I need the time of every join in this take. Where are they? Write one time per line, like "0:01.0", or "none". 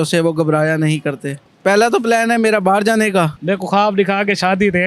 0:03.4